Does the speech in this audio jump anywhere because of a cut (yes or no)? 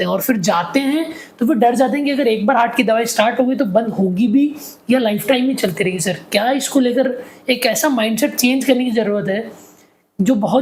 no